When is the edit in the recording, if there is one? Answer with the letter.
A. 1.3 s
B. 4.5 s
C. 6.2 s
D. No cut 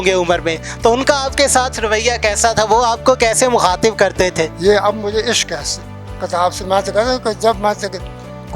B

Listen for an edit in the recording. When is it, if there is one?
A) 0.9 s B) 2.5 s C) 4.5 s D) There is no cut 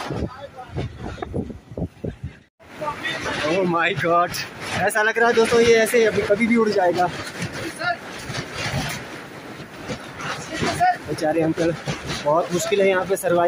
B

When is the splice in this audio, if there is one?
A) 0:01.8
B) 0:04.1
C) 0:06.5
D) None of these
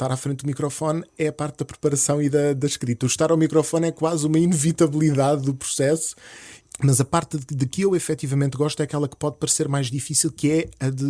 C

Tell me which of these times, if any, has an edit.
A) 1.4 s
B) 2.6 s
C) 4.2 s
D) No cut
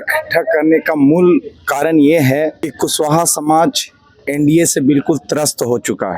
B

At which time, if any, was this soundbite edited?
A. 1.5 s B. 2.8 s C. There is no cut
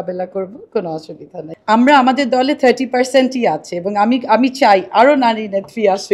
A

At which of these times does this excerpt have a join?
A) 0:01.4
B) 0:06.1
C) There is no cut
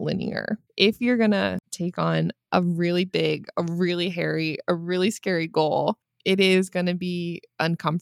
B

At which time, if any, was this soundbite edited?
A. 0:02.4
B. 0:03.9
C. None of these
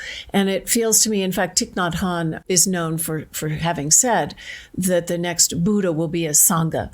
A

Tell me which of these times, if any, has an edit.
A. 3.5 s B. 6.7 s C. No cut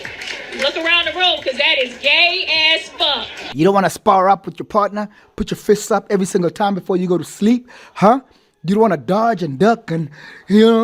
A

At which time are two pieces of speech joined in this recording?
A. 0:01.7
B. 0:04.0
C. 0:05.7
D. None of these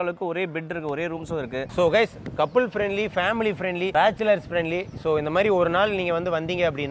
A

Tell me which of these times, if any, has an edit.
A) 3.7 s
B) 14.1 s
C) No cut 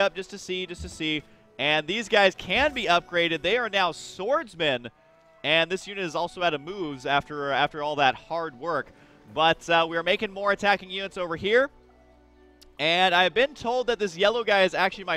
B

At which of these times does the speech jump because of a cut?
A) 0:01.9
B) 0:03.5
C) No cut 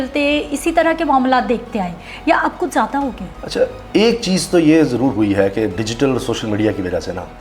C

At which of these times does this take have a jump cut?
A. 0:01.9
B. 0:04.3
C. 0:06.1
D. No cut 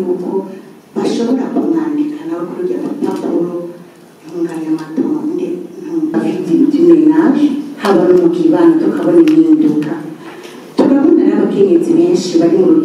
C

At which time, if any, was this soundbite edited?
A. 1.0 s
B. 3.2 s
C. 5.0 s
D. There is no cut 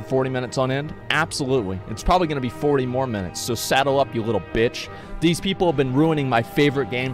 C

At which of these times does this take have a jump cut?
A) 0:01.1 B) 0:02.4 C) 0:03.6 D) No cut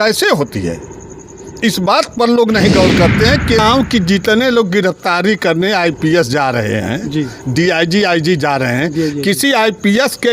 C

